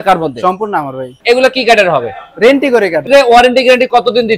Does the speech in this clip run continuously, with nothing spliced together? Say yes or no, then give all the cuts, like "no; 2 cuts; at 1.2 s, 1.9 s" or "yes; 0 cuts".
no; 2 cuts; at 1.1 s, 3.0 s